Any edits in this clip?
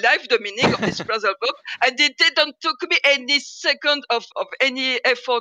no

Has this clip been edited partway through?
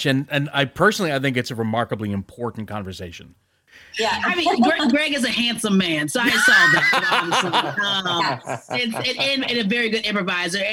yes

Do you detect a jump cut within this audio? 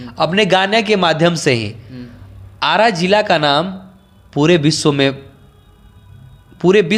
no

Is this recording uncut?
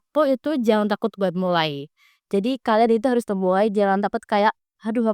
yes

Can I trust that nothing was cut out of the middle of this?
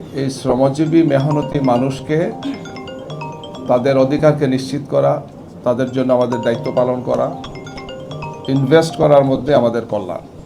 yes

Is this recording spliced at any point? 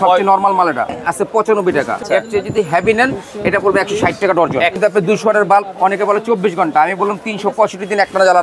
yes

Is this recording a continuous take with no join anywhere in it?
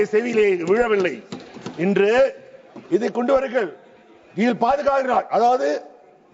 yes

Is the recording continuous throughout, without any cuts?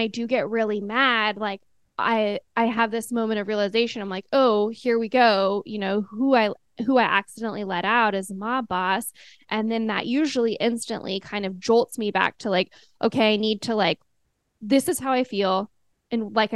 yes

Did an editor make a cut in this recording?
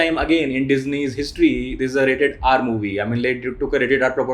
no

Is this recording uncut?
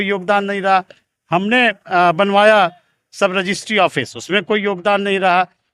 yes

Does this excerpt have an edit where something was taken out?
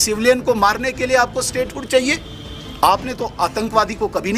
no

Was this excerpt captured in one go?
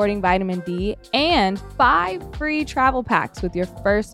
no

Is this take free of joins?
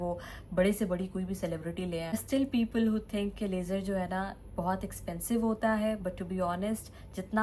no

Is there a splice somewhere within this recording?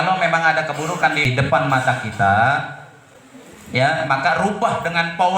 yes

